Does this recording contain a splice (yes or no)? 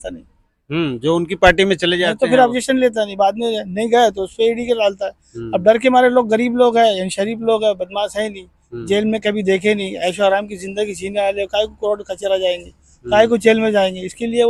no